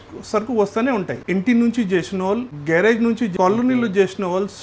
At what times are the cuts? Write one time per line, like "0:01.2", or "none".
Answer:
0:01.2
0:02.5
0:03.3